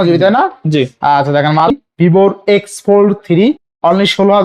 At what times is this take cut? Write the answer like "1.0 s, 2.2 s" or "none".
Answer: 1.7 s